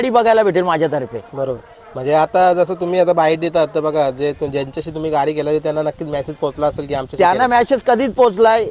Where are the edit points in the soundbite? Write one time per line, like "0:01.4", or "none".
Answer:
none